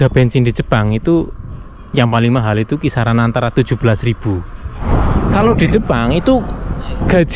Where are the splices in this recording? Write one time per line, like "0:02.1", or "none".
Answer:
0:04.8